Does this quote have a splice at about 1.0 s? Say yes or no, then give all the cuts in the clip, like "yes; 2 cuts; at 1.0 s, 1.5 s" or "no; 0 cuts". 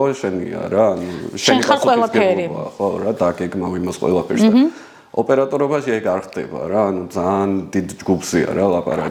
no; 0 cuts